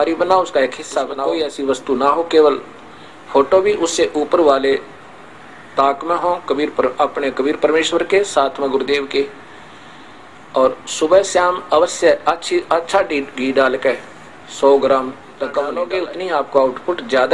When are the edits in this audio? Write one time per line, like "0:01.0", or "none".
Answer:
0:01.2
0:15.8